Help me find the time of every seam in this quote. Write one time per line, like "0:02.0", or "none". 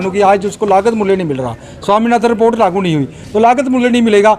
none